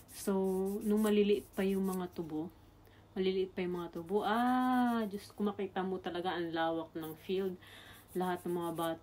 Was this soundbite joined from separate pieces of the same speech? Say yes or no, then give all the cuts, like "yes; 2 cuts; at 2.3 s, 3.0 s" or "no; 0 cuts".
no; 0 cuts